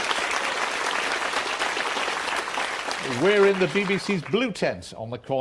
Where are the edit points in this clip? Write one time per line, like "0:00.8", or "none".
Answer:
0:02.2